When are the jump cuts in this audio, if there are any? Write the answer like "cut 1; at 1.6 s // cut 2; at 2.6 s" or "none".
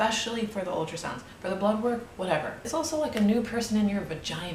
cut 1; at 2.7 s